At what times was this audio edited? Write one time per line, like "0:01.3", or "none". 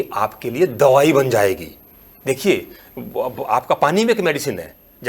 none